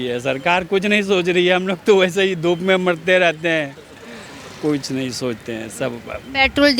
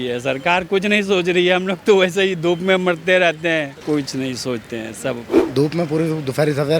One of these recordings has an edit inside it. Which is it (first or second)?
second